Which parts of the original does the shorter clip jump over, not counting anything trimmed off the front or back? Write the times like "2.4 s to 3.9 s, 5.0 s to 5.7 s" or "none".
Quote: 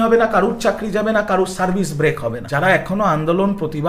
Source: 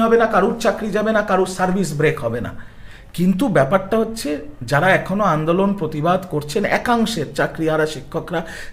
2.4 s to 4.6 s